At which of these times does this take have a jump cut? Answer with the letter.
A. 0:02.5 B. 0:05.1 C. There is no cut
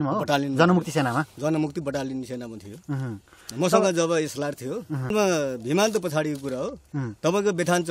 B